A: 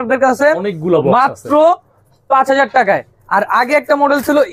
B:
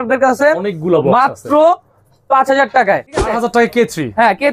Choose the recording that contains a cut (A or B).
B